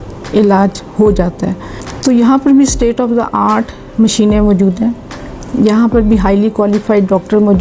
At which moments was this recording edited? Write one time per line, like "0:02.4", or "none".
0:02.0